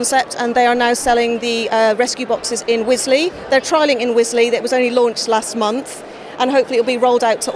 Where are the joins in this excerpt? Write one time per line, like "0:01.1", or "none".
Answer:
none